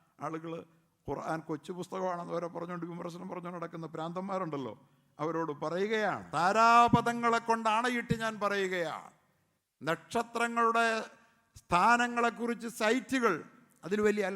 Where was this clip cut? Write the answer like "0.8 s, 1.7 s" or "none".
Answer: 6.2 s